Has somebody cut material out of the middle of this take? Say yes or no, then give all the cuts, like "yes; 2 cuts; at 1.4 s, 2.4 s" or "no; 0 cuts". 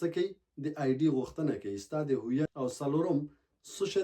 yes; 1 cut; at 2.5 s